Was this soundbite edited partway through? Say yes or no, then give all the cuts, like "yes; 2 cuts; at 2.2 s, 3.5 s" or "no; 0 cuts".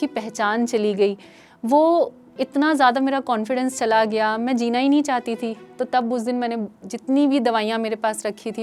no; 0 cuts